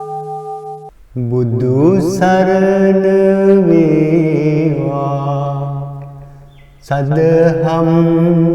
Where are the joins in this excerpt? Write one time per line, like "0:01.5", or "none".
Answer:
0:00.9